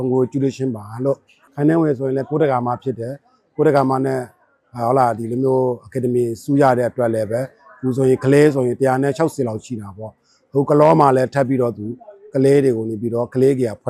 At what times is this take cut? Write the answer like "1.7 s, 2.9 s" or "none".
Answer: 1.4 s